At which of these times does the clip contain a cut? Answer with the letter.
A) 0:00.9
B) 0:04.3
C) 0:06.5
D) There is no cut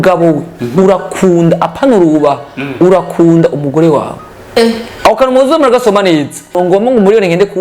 C